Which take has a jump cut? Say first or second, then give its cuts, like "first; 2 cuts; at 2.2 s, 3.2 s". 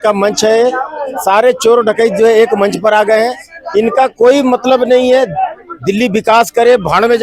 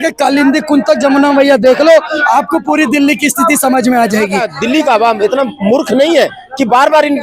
second; 1 cut; at 4.5 s